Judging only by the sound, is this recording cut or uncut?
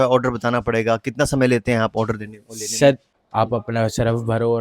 cut